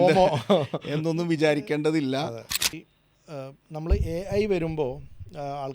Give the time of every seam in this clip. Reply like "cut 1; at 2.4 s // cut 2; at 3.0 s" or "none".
cut 1; at 2.8 s